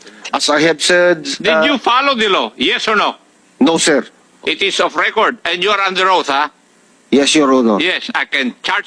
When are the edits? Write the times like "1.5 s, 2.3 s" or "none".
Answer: 4.2 s